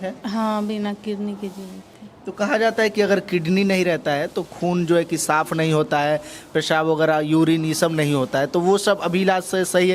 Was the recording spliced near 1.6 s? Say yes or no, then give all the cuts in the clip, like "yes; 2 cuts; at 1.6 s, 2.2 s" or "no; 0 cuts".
no; 0 cuts